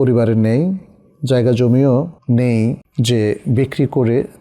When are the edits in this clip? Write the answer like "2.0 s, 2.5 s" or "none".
2.2 s, 2.9 s